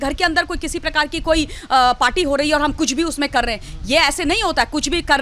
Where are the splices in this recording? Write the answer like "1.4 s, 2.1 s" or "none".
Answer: none